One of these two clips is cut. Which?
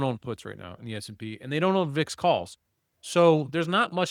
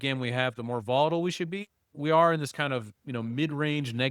second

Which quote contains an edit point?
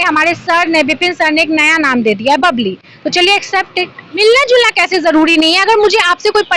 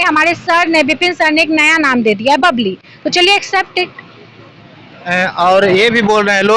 first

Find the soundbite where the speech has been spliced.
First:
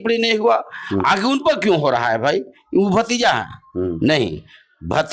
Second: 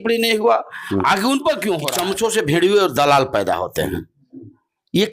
second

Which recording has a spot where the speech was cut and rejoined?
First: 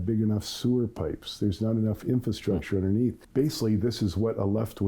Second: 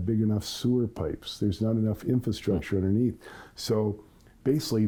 first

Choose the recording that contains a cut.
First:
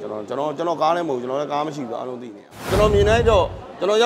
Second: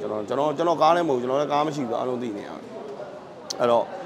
first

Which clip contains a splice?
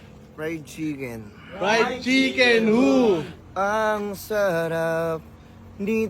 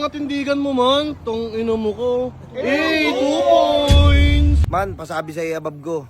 second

